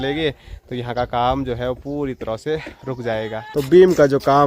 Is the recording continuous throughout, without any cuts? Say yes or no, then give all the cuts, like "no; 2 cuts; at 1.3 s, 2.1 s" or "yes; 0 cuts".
no; 1 cut; at 3.4 s